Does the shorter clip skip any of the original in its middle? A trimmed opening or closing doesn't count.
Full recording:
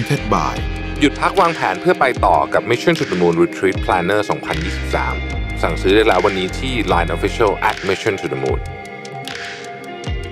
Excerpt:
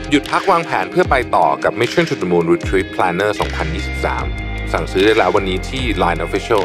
no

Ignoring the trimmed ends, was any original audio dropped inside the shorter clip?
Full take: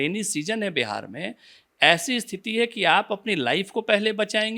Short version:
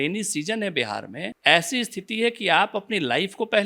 yes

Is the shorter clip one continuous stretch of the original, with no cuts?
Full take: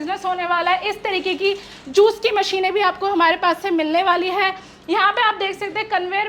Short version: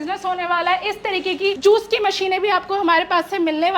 no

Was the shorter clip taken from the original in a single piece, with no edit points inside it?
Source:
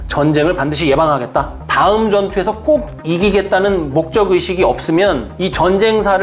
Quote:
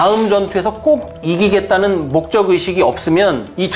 yes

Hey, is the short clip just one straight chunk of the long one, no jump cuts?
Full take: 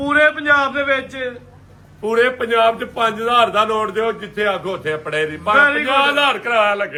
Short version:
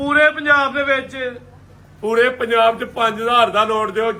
yes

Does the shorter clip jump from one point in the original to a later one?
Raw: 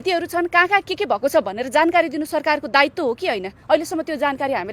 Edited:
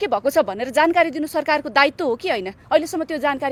no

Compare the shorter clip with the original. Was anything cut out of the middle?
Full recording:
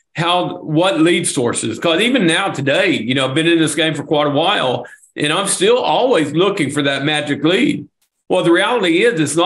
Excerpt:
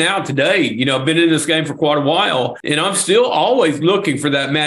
yes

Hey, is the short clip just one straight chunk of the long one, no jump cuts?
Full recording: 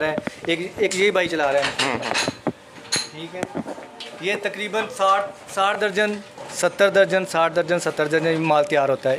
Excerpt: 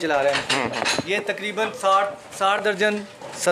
no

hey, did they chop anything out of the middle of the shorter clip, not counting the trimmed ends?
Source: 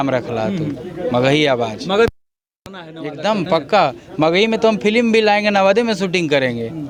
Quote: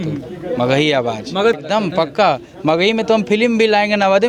yes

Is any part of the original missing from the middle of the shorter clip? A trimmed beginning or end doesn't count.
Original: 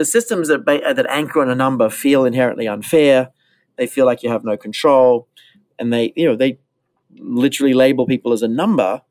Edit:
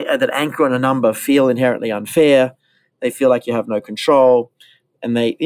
no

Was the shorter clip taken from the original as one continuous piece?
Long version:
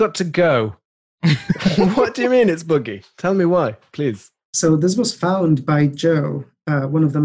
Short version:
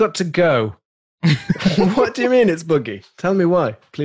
yes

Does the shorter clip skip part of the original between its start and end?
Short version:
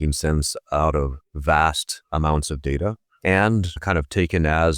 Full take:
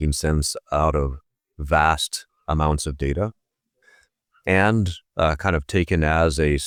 yes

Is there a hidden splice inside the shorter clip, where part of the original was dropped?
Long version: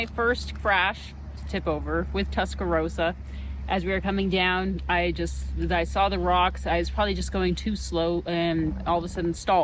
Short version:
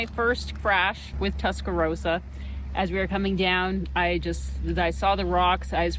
yes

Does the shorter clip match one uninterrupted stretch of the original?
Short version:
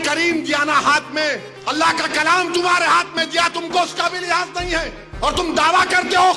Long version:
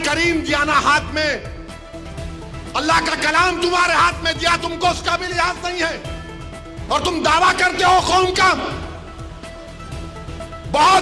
no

